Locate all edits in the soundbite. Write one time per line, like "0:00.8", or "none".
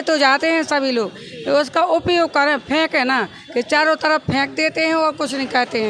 none